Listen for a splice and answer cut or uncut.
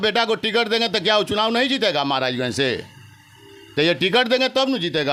uncut